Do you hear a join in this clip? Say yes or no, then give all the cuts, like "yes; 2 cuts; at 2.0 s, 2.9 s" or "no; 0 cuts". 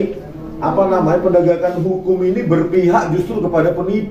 no; 0 cuts